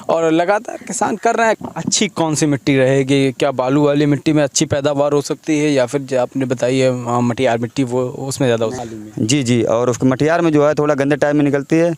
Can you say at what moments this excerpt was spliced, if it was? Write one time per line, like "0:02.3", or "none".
0:01.6
0:08.8